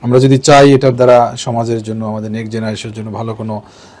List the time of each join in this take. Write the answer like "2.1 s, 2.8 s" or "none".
none